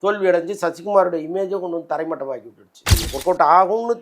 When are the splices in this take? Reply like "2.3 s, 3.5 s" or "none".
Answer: 3.0 s